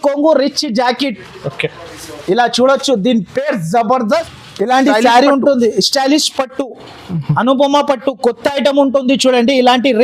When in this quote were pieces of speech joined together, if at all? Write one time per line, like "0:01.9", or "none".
0:04.3